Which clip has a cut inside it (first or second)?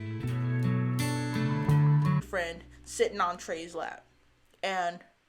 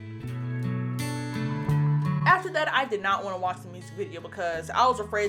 first